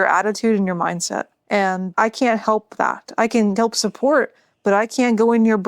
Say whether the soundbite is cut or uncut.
cut